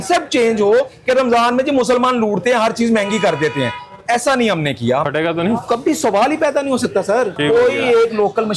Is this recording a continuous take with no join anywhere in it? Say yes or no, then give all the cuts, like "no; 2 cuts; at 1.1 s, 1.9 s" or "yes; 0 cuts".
no; 2 cuts; at 5.1 s, 7.3 s